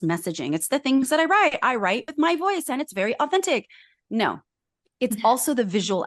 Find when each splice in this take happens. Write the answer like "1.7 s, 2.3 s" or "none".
2.1 s